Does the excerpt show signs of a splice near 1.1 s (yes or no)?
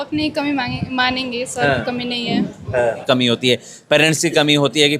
no